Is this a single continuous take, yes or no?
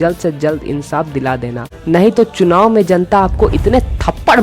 no